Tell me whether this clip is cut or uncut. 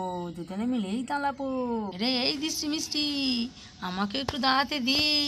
cut